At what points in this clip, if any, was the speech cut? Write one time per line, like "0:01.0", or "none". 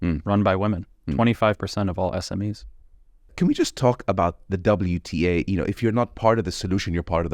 0:03.3
0:05.8